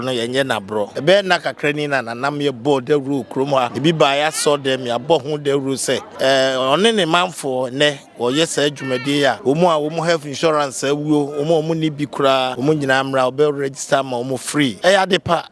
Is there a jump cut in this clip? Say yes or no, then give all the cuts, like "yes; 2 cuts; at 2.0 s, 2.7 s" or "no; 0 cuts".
yes; 6 cuts; at 0.9 s, 3.7 s, 6.1 s, 9.4 s, 12.5 s, 14.8 s